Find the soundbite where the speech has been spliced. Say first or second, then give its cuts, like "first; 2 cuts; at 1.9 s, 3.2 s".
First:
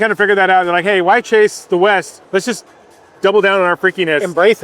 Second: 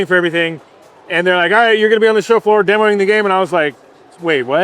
first; 1 cut; at 2.2 s